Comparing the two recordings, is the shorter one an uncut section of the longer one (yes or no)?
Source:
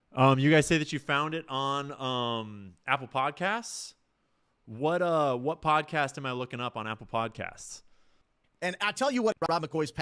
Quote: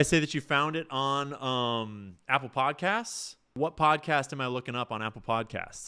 no